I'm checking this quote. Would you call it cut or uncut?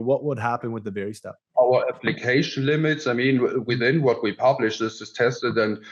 cut